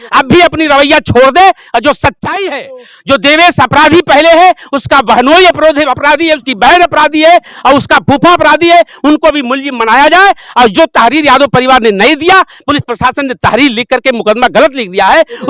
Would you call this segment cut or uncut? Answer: uncut